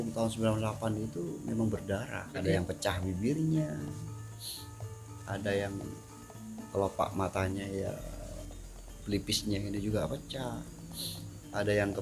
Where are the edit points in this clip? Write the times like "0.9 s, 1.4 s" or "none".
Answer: 2.3 s